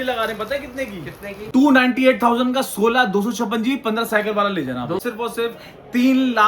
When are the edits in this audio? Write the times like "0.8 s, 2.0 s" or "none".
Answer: 1.3 s, 5.0 s